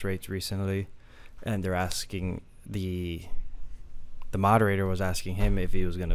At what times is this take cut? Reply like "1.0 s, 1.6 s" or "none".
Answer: none